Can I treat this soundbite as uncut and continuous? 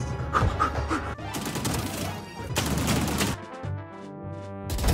no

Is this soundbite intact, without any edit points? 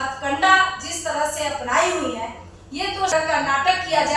no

